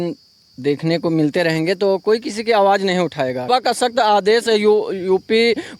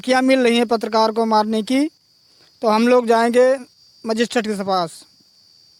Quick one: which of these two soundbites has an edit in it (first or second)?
first